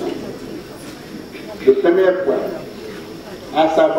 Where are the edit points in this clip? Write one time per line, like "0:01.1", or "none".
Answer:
none